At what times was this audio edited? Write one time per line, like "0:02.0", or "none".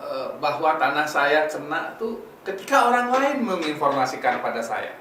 none